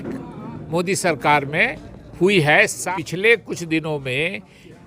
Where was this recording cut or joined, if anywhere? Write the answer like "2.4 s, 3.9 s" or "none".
2.8 s

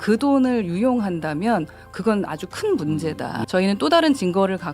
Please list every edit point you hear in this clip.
3.3 s

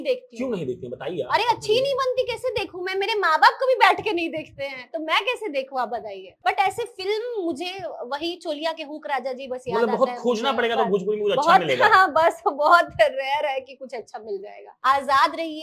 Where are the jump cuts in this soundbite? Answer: 6.3 s, 14.7 s

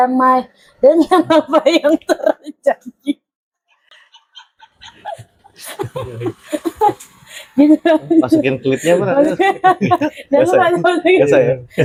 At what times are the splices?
none

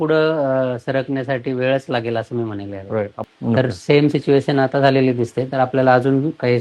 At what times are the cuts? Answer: 3.3 s

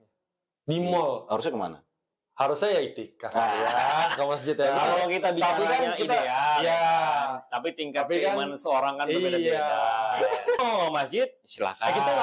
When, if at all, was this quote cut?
10.6 s

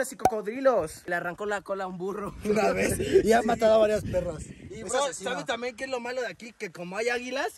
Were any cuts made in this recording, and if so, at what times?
1.1 s

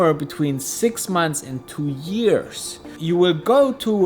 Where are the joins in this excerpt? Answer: 2.9 s

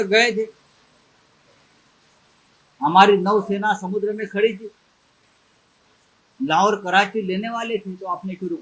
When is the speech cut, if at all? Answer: none

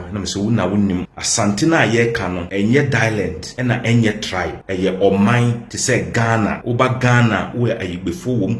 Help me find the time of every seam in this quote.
1.2 s, 2.4 s, 3.4 s, 4.6 s, 5.7 s, 6.6 s

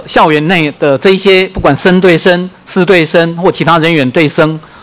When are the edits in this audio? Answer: none

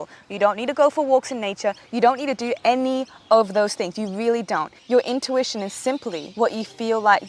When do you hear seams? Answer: 4.7 s, 6.2 s

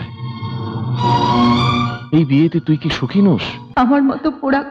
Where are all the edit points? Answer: 3.6 s

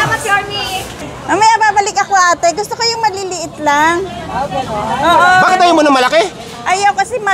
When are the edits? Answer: 1.0 s

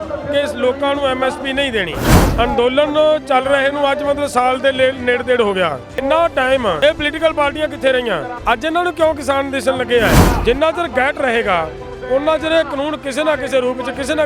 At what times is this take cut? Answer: 2.2 s, 6.0 s, 6.8 s, 8.3 s, 10.3 s

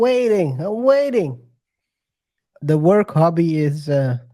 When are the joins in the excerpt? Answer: 2.5 s

